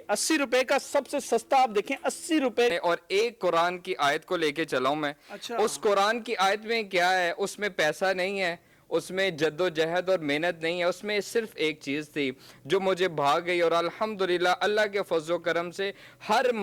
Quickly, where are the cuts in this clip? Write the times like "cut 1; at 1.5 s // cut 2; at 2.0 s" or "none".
cut 1; at 2.7 s